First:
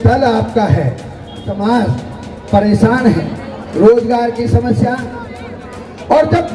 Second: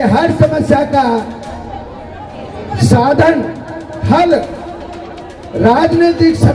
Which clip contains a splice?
first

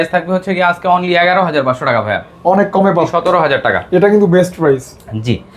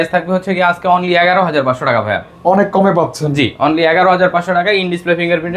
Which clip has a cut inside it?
first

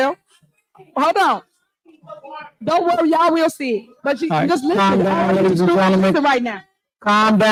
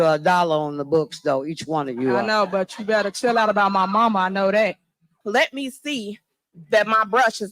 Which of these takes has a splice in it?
second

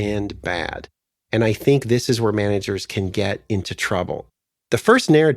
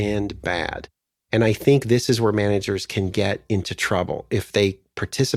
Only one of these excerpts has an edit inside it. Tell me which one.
first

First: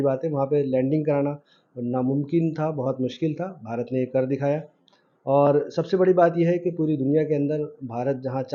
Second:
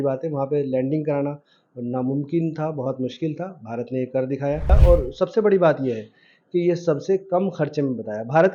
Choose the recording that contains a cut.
second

